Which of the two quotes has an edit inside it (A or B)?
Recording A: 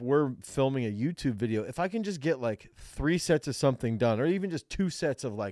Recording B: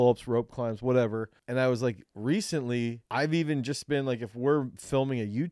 B